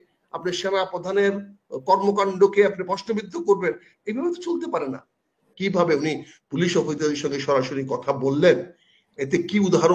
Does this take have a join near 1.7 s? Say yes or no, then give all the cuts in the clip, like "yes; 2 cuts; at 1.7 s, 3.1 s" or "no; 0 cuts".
no; 1 cut; at 5.5 s